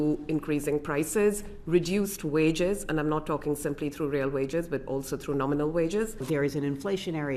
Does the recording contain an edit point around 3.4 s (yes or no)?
no